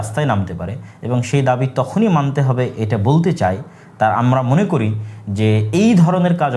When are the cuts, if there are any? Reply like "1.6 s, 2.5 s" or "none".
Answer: none